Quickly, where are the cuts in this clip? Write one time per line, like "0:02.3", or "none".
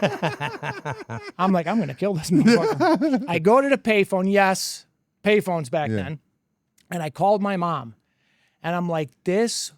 0:03.2